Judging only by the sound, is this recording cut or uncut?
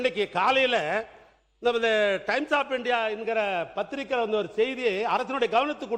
uncut